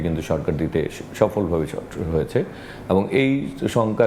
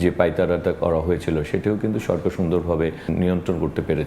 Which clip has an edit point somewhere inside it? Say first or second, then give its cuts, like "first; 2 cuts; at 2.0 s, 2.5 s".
second; 1 cut; at 3.1 s